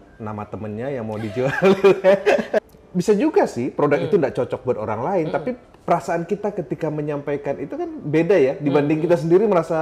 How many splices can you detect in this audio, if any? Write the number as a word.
one